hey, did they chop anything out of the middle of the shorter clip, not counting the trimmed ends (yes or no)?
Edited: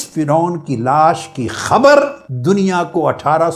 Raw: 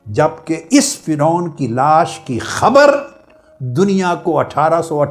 yes